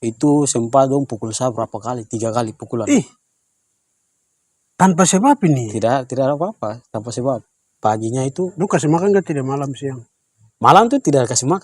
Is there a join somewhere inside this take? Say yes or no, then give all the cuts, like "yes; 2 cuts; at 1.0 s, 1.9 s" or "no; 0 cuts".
yes; 1 cut; at 7.7 s